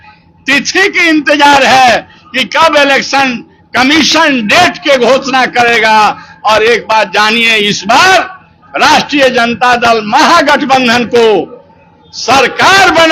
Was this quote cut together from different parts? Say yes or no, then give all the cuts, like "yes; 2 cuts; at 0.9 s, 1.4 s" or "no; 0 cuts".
no; 0 cuts